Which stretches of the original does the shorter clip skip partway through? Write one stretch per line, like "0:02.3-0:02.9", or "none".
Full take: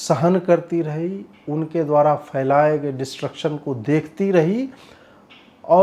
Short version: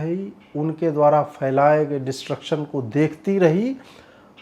none